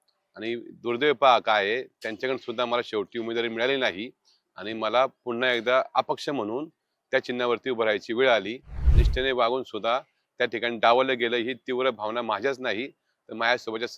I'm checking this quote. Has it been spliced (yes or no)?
yes